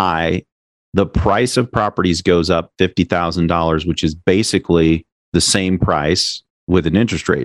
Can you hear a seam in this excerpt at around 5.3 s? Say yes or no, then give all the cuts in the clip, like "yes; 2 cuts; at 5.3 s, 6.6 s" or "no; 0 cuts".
yes; 1 cut; at 5.3 s